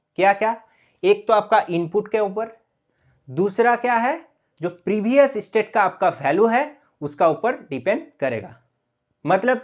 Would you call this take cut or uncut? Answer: uncut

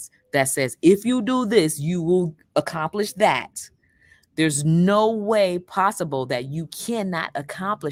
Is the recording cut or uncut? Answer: uncut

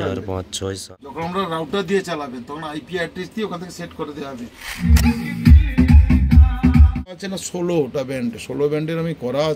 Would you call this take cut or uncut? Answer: cut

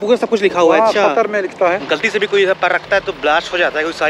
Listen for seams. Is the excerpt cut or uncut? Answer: cut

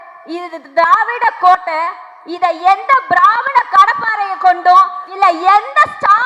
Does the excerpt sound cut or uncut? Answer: cut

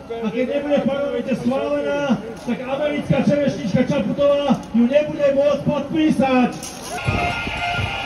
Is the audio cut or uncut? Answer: cut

